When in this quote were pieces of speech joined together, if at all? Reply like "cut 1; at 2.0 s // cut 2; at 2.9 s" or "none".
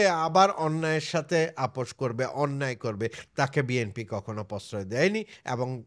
none